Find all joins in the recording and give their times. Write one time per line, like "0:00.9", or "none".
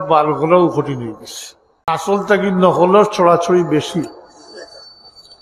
0:01.9